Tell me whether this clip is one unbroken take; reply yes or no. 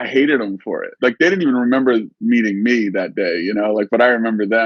no